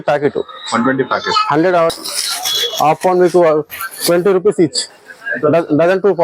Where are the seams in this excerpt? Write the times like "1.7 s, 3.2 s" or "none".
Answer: 1.9 s